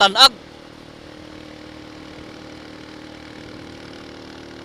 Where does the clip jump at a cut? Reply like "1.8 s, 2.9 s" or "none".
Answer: none